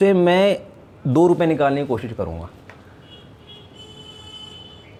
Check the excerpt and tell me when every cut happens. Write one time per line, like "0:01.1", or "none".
none